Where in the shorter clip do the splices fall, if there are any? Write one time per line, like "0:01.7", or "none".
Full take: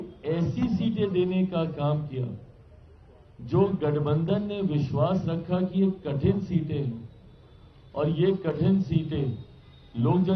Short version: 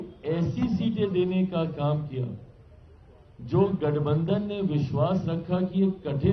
none